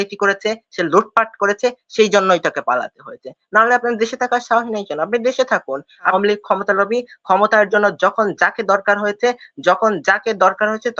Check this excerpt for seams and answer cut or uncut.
cut